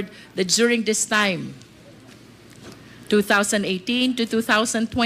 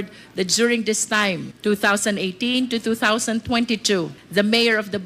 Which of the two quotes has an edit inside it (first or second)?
second